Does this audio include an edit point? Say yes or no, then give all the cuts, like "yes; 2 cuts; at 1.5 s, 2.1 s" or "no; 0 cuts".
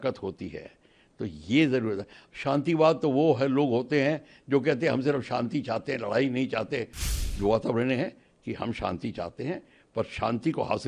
yes; 1 cut; at 7.0 s